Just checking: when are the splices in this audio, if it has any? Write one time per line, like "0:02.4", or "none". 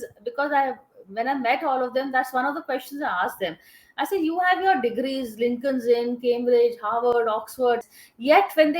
0:07.8